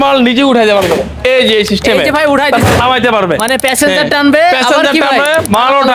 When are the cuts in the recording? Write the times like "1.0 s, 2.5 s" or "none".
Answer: none